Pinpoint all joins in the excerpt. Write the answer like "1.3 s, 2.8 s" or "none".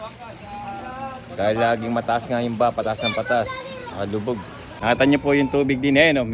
4.7 s